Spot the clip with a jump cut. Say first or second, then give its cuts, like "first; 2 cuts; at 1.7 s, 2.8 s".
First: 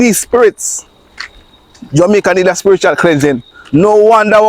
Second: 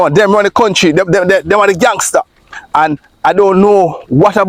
first; 1 cut; at 3.5 s